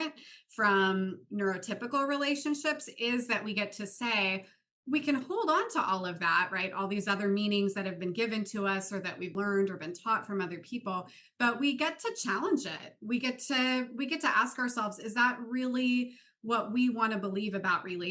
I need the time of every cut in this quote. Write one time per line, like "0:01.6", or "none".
0:09.3